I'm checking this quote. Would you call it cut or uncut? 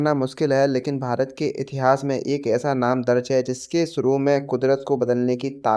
uncut